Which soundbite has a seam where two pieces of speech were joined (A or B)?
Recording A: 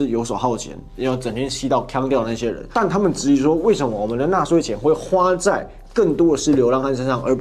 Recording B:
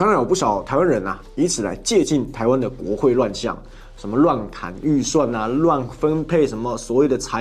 A